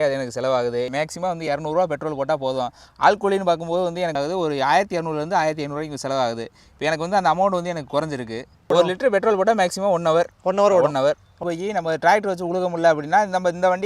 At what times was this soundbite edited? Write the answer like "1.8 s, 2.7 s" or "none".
0.9 s, 4.1 s, 8.6 s, 11.3 s